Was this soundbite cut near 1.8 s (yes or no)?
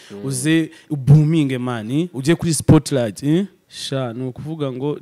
no